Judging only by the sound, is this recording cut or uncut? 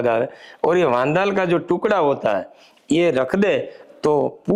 uncut